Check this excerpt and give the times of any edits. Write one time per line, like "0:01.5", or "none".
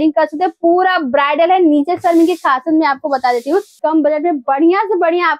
0:03.7